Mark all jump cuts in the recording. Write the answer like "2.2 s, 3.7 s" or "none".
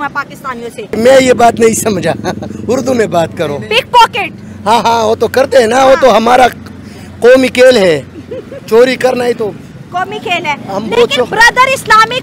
0.9 s